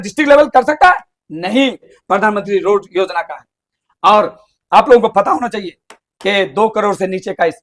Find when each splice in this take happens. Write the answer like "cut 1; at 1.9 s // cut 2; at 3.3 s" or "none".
cut 1; at 2.0 s

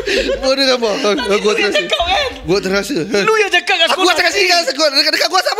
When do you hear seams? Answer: none

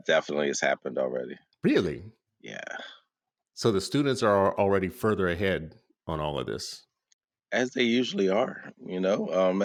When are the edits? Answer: none

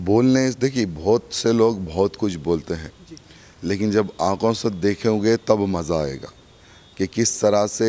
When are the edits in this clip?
none

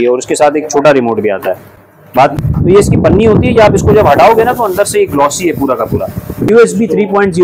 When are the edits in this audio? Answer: cut 1; at 2.3 s // cut 2; at 6.5 s

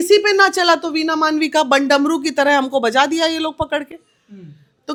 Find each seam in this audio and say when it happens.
none

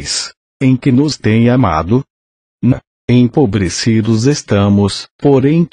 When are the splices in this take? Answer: none

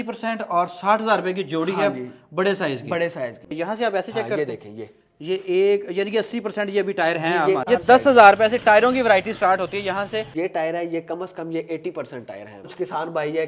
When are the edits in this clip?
cut 1; at 3.4 s // cut 2; at 7.6 s // cut 3; at 10.3 s // cut 4; at 12.7 s

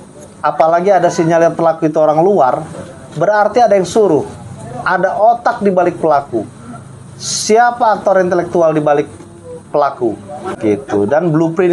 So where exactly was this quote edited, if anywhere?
cut 1; at 10.5 s

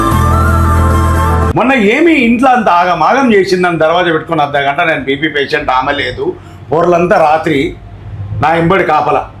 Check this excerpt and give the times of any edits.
cut 1; at 1.4 s

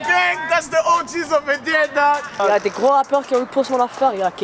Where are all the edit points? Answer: cut 1; at 2.3 s

